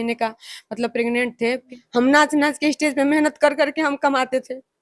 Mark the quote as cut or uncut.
cut